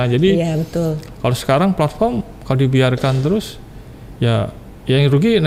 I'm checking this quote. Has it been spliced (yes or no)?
no